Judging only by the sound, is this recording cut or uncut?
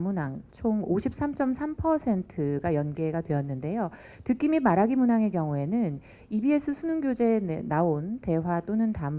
uncut